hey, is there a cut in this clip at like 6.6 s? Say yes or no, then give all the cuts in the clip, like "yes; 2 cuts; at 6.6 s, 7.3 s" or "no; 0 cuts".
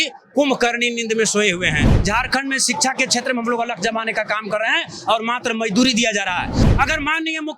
yes; 2 cuts; at 1.9 s, 6.6 s